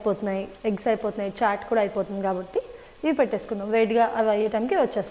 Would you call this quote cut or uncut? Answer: uncut